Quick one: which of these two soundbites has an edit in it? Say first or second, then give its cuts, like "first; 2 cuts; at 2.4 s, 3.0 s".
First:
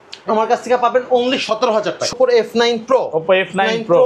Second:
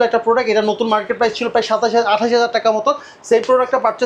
first; 1 cut; at 2.1 s